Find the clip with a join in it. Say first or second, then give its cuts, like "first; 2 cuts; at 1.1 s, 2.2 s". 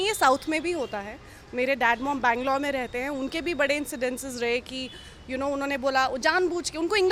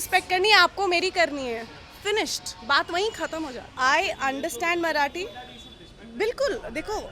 second; 1 cut; at 3.7 s